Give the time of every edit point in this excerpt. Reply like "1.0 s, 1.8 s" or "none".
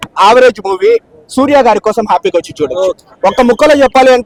none